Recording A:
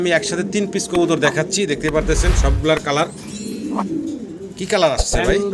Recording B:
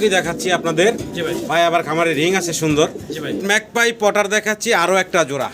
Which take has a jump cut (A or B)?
B